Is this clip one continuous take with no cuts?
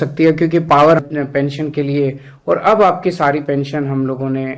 no; 1 cut; at 1.0 s

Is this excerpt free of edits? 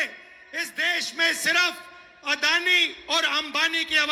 yes; 0 cuts

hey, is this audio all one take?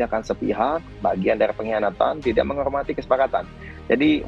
yes; 0 cuts

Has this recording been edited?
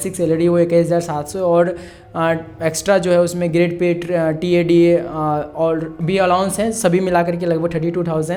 no; 0 cuts

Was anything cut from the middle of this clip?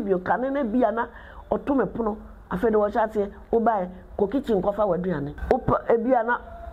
yes; 1 cut; at 5.3 s

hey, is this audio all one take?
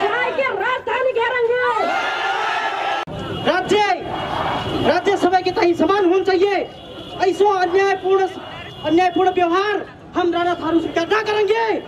no; 1 cut; at 3.0 s

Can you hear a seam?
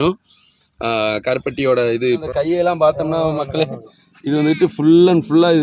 yes; 1 cut; at 2.1 s

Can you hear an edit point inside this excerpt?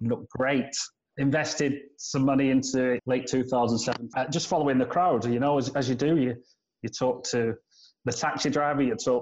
no; 0 cuts

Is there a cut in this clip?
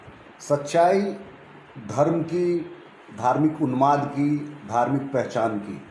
no; 0 cuts

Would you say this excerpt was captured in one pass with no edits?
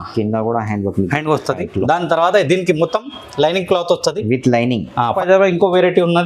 no; 1 cut; at 5.1 s

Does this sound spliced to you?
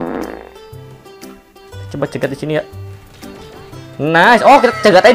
no; 0 cuts

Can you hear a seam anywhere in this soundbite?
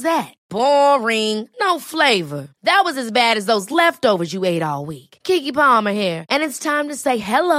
no; 0 cuts

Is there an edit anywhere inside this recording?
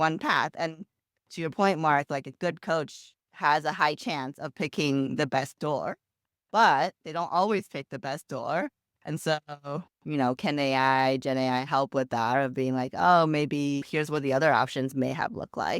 no; 0 cuts

